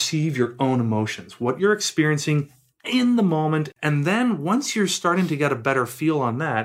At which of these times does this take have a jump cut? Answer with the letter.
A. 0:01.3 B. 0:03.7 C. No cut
B